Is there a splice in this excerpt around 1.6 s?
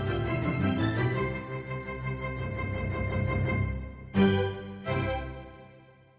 no; 0 cuts

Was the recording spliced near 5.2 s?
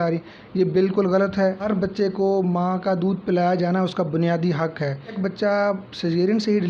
yes; 2 cuts; at 1.6 s, 5.2 s

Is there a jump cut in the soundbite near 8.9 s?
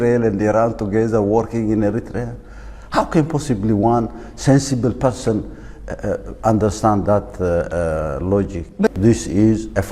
yes; 1 cut; at 8.9 s

